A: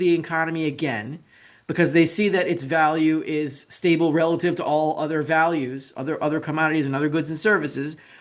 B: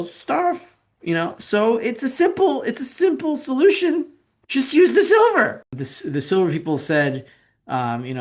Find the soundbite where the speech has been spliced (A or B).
B